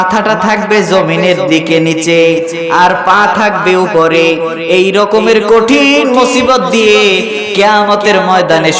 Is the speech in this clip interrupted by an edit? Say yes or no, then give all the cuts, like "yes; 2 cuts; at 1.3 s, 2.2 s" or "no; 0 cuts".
no; 0 cuts